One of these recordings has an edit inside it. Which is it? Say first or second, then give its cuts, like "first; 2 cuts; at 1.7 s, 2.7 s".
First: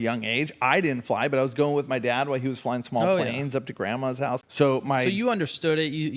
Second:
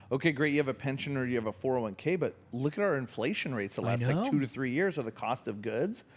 first; 1 cut; at 4.5 s